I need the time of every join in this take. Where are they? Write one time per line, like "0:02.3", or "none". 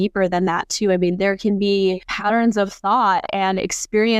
0:02.1